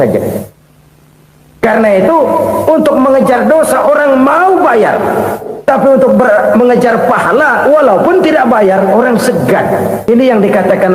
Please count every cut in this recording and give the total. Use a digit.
1